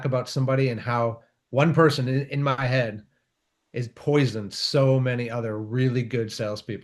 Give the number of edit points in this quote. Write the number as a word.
zero